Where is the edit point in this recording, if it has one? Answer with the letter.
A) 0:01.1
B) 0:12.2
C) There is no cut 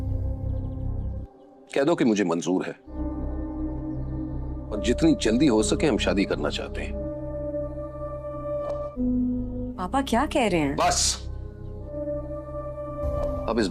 A